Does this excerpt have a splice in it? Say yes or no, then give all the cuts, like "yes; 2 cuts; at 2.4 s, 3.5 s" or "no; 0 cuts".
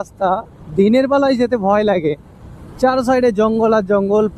no; 0 cuts